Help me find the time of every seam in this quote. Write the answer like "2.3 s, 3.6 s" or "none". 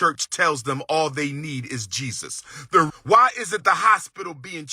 2.9 s